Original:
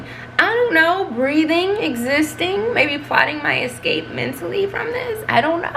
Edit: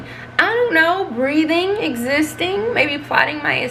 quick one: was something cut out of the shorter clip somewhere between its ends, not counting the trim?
no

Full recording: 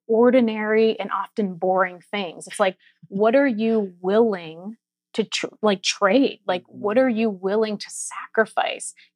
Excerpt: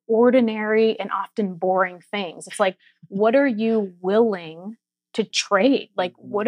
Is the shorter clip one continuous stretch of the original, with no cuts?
no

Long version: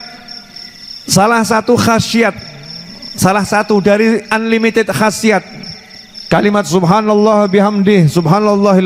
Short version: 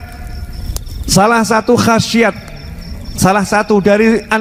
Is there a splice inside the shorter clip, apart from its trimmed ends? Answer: no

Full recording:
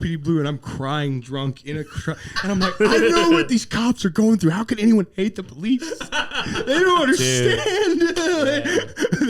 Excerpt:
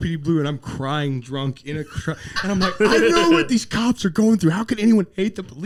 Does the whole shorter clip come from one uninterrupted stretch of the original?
yes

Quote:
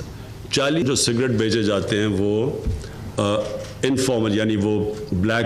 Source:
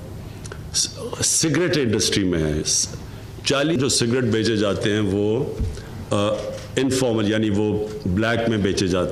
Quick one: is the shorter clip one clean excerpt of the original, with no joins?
yes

